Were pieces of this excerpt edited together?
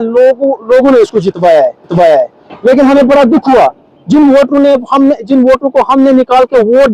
no; 0 cuts

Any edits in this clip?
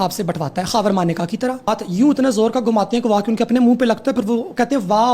yes; 1 cut; at 1.7 s

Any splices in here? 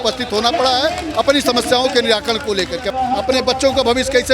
yes; 1 cut; at 2.9 s

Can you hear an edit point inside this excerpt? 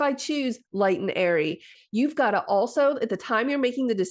yes; 1 cut; at 1.7 s

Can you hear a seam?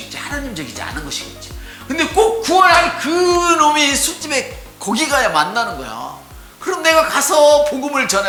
no; 0 cuts

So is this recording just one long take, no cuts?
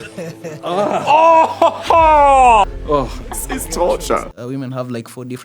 no; 1 cut; at 4.3 s

